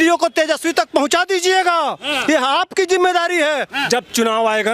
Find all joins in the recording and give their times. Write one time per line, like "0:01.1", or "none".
0:03.8